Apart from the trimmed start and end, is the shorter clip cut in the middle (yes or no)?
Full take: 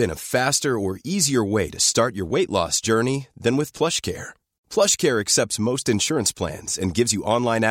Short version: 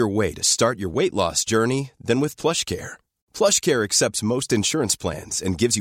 no